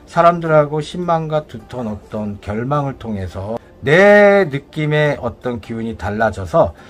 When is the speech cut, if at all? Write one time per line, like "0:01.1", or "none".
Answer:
none